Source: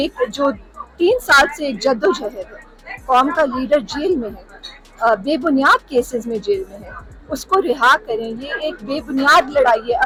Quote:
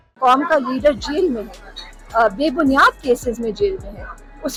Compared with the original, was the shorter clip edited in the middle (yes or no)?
no